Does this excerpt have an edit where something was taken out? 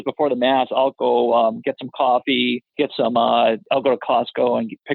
yes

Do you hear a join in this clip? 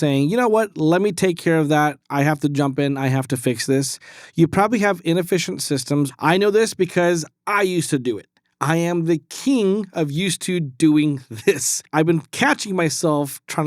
yes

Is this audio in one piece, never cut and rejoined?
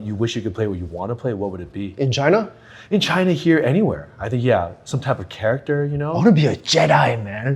yes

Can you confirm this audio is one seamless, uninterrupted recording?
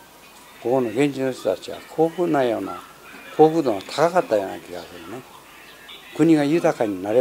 no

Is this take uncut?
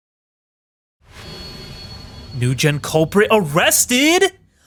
yes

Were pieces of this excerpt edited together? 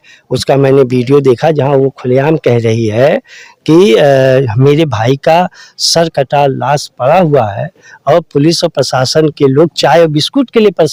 no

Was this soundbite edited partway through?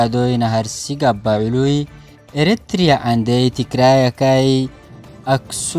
no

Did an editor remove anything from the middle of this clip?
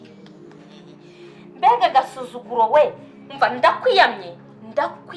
yes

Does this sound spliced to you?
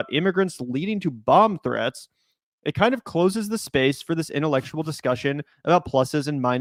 no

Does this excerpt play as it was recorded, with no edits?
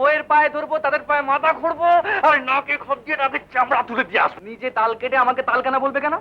no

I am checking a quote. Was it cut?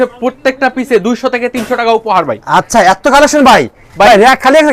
no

